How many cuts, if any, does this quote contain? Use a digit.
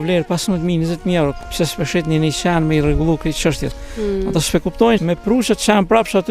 2